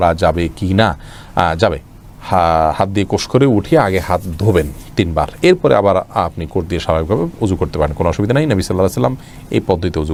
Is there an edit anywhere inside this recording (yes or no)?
no